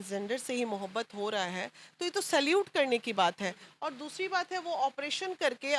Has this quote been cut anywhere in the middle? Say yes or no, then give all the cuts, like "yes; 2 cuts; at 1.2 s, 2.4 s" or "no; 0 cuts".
no; 0 cuts